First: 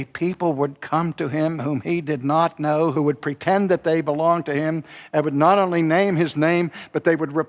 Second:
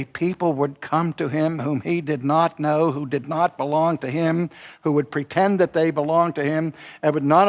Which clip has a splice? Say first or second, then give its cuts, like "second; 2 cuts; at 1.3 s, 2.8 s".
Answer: first; 1 cut; at 2.9 s